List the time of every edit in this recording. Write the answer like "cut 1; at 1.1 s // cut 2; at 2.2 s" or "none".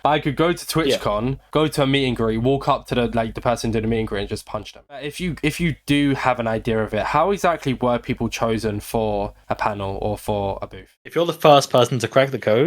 cut 1; at 5.0 s // cut 2; at 10.9 s